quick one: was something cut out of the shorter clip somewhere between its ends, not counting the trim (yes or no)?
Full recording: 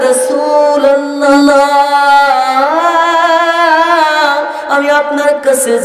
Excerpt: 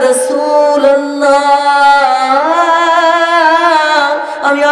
yes